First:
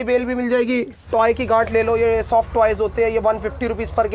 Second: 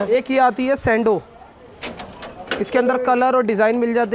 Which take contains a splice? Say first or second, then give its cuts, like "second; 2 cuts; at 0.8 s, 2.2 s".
first; 1 cut; at 1.0 s